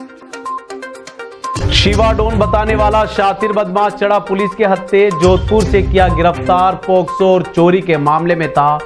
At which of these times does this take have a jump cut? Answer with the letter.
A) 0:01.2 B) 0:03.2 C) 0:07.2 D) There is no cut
A